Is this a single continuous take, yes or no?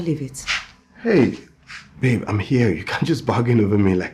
no